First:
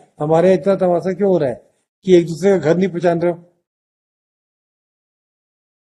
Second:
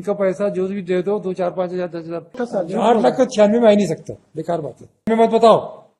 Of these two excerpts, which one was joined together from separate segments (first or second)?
second